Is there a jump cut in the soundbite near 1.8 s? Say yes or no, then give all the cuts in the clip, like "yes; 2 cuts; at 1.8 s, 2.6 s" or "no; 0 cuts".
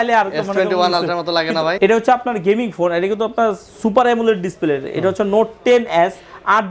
yes; 1 cut; at 1.8 s